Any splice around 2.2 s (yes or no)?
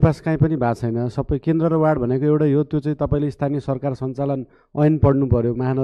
no